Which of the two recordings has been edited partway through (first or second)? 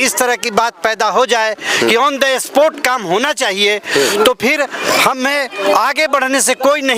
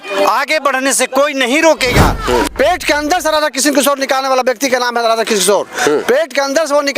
second